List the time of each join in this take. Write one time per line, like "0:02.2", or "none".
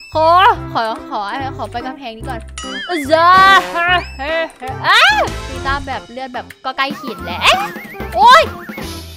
0:05.4